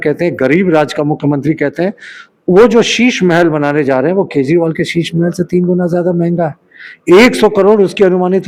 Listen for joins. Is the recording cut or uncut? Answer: uncut